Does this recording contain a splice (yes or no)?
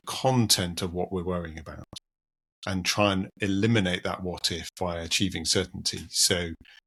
no